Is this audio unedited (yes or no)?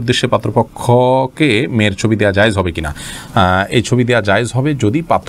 yes